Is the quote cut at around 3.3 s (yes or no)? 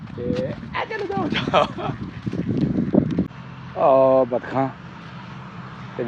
yes